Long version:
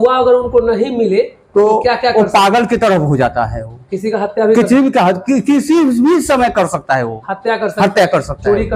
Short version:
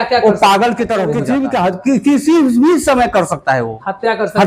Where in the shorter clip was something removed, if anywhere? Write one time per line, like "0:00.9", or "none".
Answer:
0:01.2